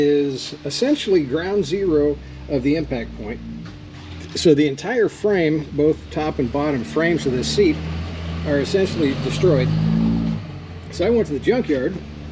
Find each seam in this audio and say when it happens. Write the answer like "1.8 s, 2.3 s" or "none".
none